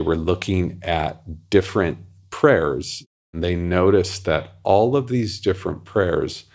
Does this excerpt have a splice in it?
yes; 1 cut; at 3.3 s

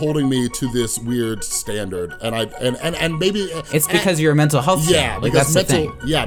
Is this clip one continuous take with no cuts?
yes; 0 cuts

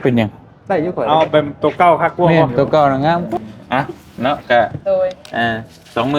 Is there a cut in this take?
yes; 1 cut; at 3.3 s

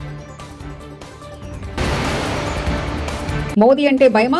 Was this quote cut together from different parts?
yes; 1 cut; at 1.3 s

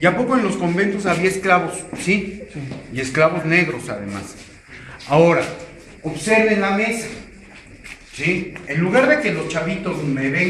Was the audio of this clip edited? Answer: yes; 1 cut; at 6.4 s

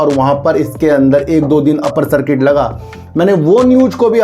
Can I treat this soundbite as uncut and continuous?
yes; 0 cuts

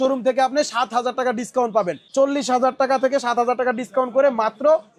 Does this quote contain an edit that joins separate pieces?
no; 0 cuts

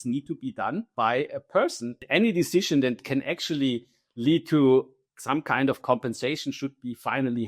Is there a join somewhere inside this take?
yes; 2 cuts; at 0.9 s, 2.0 s

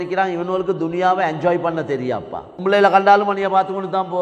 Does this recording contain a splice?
yes; 1 cut; at 2.5 s

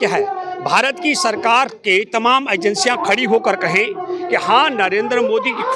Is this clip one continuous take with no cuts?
yes; 0 cuts

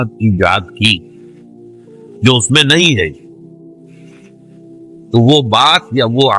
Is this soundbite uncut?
no; 2 cuts; at 3.6 s, 5.0 s

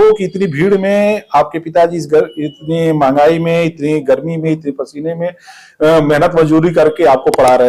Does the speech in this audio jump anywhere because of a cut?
no; 0 cuts

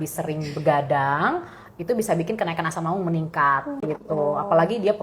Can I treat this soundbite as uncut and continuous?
no; 1 cut; at 3.7 s

